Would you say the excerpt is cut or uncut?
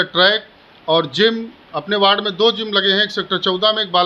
uncut